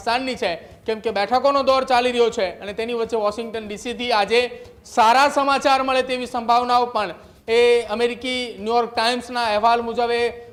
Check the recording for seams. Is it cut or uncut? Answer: uncut